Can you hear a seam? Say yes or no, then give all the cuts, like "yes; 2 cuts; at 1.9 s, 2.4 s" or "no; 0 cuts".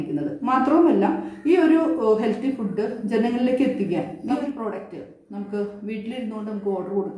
yes; 1 cut; at 4.3 s